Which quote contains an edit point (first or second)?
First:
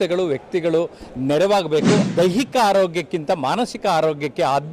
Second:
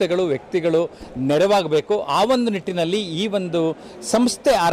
first